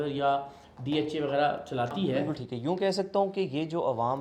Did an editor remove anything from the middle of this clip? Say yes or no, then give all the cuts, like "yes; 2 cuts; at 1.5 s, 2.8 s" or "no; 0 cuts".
yes; 1 cut; at 2.3 s